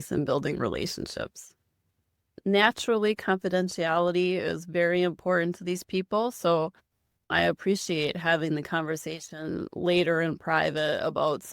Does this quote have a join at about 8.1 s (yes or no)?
no